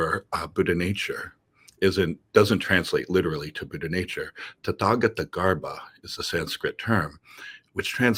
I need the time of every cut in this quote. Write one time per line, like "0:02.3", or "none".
none